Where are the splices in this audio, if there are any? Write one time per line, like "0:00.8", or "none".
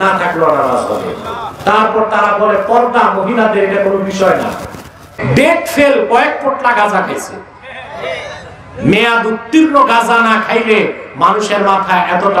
0:05.1